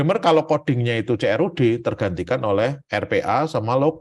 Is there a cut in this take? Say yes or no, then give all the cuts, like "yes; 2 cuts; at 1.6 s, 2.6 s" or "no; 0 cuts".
no; 0 cuts